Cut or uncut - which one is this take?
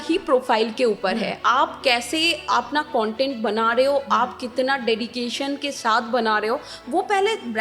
uncut